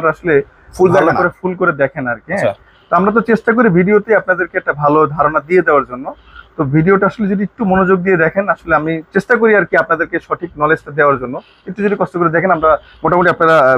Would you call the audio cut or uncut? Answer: uncut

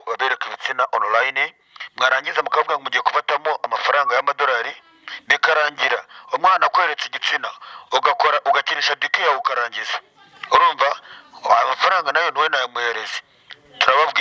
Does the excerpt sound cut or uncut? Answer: uncut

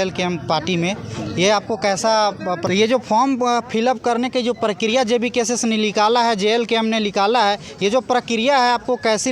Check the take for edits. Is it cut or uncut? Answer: cut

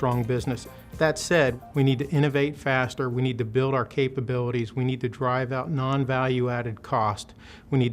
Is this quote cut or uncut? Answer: uncut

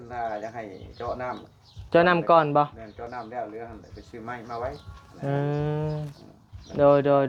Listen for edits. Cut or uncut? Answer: uncut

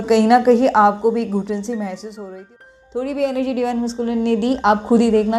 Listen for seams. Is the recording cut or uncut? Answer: cut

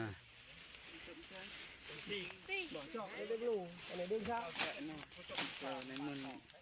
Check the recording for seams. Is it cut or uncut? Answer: cut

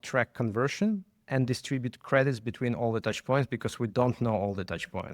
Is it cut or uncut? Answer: cut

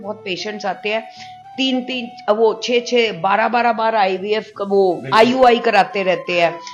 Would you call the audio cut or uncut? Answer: uncut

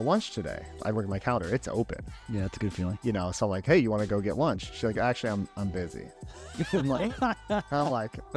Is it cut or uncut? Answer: cut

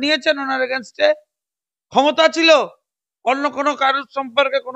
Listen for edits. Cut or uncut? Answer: uncut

